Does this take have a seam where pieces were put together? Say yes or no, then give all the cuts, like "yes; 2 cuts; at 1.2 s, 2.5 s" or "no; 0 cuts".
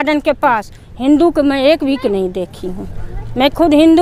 no; 0 cuts